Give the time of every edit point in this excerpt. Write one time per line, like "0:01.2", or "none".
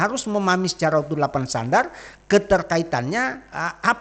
none